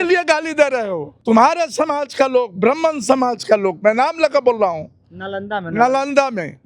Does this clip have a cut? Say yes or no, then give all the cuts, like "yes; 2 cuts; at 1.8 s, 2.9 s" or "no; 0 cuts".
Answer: yes; 1 cut; at 1.1 s